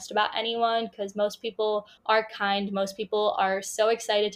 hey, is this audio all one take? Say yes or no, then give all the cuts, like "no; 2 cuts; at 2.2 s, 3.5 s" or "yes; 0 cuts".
no; 1 cut; at 1.9 s